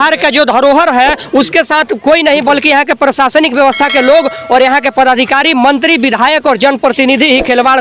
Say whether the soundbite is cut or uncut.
uncut